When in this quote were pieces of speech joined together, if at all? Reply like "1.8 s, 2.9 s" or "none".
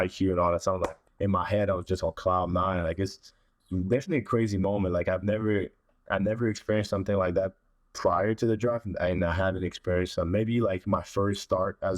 1.0 s